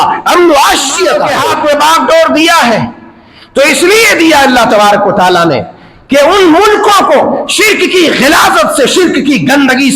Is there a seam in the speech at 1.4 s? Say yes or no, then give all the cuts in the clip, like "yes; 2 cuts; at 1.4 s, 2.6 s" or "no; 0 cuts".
yes; 1 cut; at 1.4 s